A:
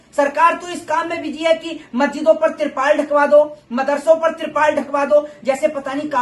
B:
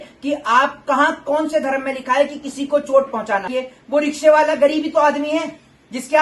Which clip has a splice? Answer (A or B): B